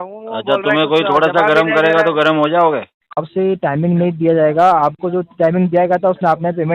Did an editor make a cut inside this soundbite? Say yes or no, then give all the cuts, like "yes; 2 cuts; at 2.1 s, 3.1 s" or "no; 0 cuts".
yes; 1 cut; at 3.0 s